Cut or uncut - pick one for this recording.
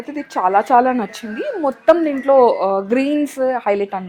uncut